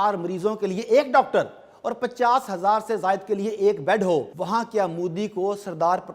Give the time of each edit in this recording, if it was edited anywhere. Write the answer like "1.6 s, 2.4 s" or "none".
4.4 s